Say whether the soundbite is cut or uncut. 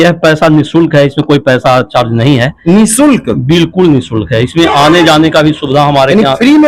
uncut